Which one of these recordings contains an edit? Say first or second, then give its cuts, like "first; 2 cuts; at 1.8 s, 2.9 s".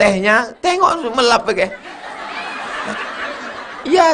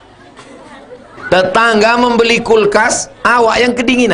second; 1 cut; at 1.2 s